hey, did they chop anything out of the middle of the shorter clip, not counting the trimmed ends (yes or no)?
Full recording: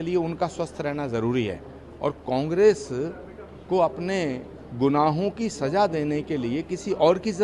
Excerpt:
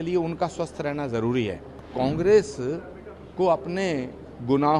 yes